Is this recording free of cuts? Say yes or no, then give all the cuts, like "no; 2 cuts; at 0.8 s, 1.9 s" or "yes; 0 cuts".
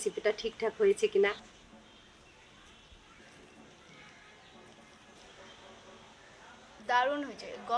no; 4 cuts; at 1.4 s, 3.2 s, 5.2 s, 6.8 s